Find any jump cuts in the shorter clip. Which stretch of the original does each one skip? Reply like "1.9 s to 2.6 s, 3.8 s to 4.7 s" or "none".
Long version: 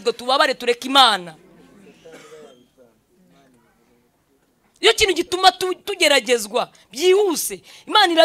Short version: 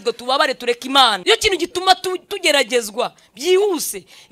1.2 s to 4.8 s